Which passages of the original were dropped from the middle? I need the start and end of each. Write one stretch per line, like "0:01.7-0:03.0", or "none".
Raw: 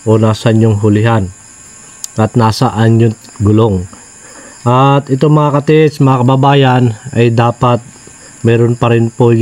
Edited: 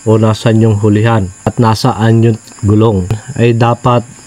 0:01.5-0:02.3
0:04.0-0:07.0